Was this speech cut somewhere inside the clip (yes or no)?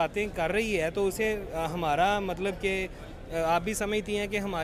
no